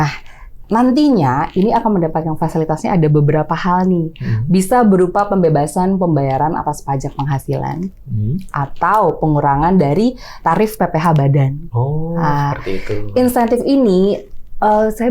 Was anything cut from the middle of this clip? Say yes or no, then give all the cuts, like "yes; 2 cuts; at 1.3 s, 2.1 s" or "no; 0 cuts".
no; 0 cuts